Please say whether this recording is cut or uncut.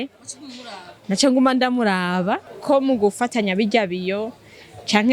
cut